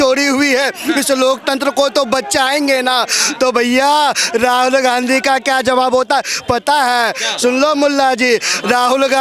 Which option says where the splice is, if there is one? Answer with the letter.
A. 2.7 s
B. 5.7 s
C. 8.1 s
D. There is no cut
D